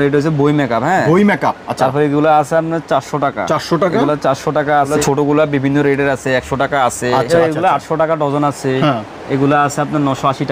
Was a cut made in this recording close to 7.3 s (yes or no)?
yes